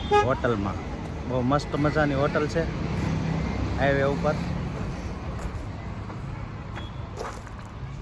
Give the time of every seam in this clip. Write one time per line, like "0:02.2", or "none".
none